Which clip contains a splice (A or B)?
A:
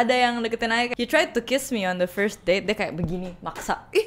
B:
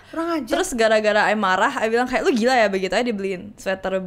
A